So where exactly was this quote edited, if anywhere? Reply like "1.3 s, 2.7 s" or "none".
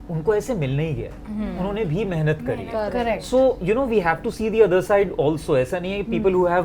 none